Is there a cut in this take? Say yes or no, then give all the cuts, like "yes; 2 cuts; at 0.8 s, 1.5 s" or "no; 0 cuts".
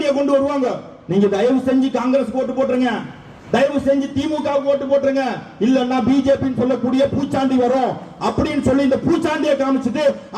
no; 0 cuts